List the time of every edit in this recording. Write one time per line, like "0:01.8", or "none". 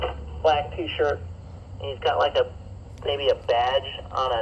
none